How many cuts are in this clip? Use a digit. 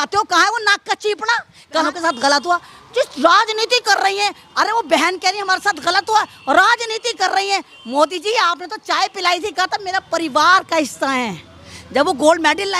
1